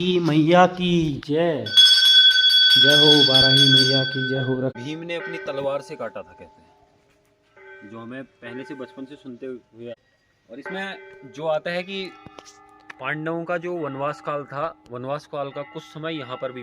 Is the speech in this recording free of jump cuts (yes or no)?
no